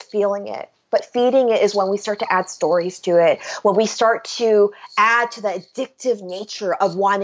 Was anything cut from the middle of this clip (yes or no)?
no